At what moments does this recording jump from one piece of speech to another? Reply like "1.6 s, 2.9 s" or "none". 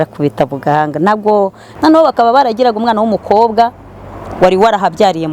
1.6 s